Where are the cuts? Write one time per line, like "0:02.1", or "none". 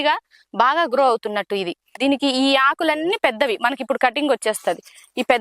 0:01.9